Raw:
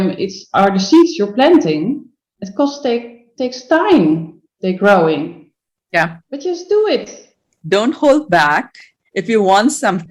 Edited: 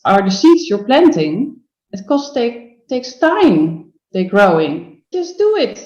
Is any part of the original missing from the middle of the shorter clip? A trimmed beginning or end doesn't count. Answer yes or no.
yes